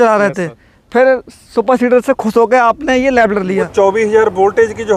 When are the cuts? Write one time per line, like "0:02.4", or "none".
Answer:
0:03.7